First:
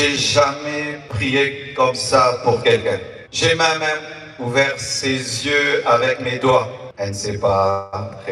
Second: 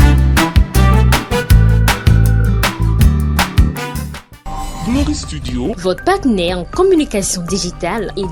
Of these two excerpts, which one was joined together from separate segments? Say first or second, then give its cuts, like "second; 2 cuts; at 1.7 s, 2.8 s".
first; 2 cuts; at 3.2 s, 6.8 s